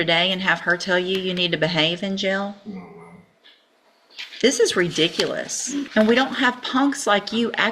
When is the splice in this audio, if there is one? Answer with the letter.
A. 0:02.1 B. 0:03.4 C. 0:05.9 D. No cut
C